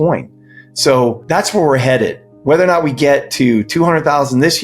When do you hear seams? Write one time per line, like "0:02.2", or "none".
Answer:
0:01.2